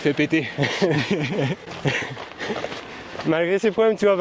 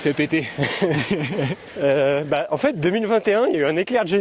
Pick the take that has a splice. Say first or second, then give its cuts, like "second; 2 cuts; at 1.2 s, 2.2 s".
second; 1 cut; at 1.6 s